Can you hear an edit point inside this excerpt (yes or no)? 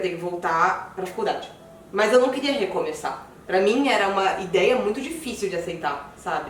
no